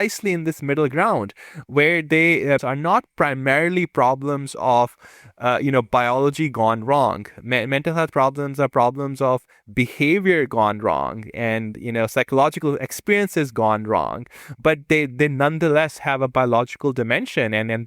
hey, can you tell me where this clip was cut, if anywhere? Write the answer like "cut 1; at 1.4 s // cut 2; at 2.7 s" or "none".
cut 1; at 2.6 s